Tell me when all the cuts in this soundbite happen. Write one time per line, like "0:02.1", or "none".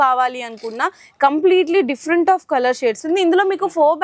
0:03.0